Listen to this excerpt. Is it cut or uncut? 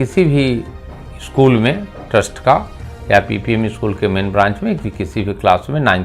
uncut